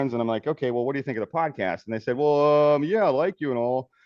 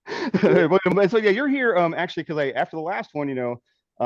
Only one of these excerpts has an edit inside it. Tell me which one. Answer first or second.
second